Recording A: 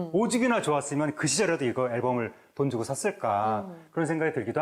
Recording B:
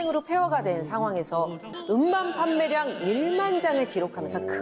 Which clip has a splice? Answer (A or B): B